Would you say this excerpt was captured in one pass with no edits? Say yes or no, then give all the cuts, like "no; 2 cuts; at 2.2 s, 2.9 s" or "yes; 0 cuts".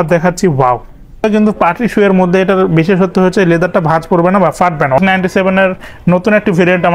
no; 2 cuts; at 1.2 s, 5.0 s